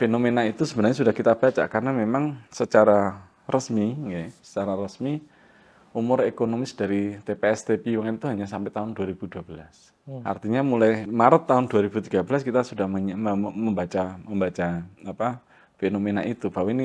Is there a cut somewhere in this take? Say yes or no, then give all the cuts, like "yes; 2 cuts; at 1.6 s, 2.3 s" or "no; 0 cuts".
yes; 2 cuts; at 10.2 s, 11.0 s